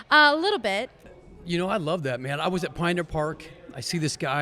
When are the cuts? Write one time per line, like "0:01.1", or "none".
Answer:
0:00.9